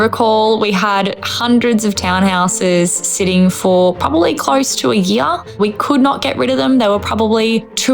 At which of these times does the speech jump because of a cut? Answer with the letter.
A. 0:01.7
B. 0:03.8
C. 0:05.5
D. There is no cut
C